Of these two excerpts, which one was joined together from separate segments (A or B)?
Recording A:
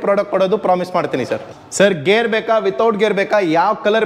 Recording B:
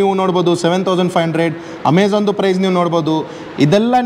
A